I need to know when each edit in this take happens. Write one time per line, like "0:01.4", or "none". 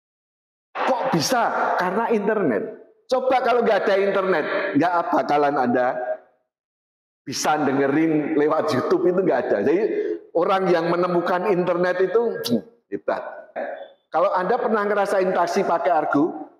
0:13.6